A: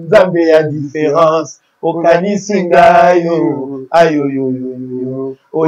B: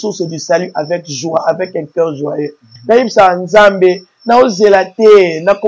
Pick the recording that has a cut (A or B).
B